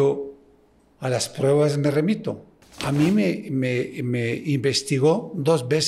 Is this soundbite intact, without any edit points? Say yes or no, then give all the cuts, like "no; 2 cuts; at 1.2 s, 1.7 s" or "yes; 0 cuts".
yes; 0 cuts